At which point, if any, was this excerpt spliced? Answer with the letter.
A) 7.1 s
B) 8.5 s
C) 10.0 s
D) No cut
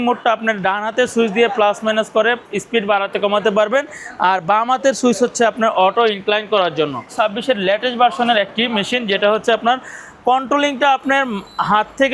A